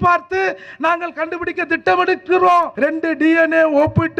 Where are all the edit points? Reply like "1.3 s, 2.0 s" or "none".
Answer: 2.7 s